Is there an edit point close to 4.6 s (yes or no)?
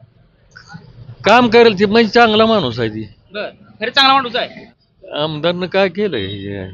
yes